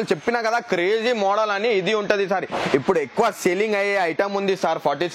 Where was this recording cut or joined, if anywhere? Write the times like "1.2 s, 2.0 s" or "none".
none